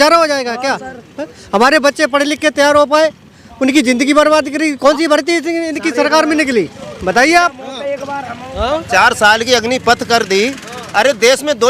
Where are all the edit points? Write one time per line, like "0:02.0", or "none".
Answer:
none